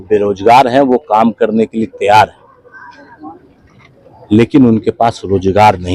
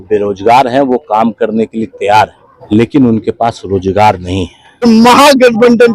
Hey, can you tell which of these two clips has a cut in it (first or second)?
second